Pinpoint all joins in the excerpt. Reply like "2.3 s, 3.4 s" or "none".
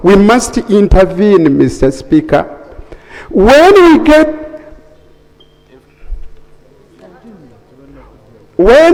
none

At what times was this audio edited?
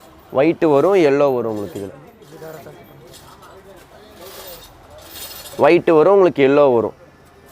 none

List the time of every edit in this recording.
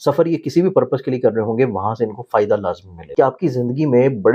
3.0 s

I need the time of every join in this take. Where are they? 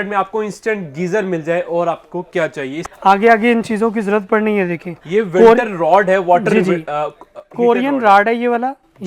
2.8 s

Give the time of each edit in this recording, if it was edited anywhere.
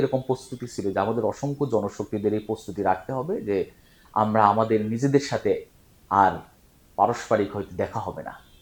none

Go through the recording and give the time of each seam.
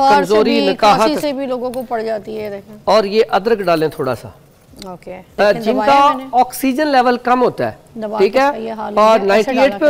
5.2 s

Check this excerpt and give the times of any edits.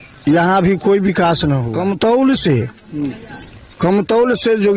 1.7 s

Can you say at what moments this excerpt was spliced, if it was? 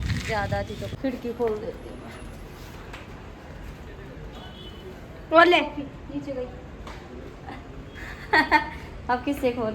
0.9 s

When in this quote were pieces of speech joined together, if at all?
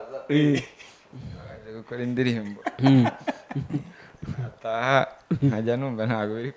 none

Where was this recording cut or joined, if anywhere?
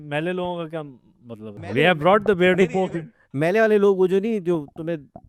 1.6 s

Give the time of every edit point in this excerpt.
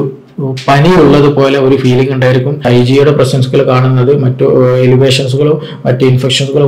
2.6 s

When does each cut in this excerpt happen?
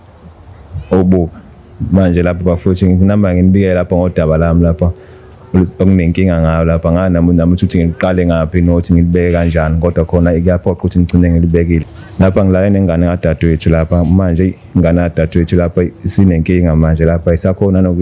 11.8 s

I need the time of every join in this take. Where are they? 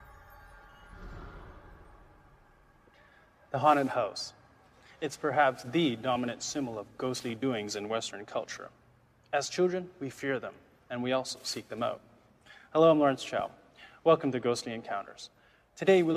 none

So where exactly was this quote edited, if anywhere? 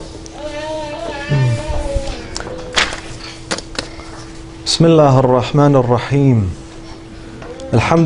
none

